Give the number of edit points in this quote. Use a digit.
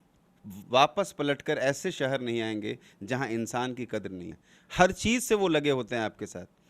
1